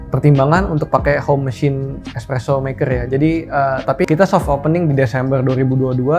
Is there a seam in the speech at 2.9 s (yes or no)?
no